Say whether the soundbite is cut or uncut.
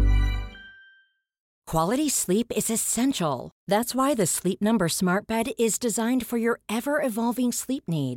cut